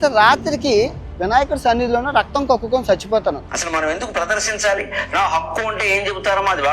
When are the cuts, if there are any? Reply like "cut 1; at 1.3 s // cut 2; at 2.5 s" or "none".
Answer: cut 1; at 3.4 s